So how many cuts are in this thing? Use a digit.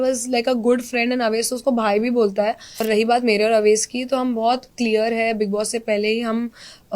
1